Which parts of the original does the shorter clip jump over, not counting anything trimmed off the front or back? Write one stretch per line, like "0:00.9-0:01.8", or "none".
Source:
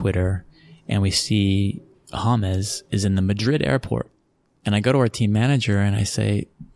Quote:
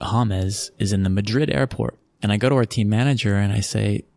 0:04.2-0:04.5